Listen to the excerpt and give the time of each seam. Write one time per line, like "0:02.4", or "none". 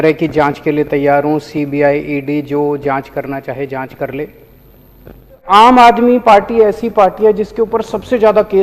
0:05.5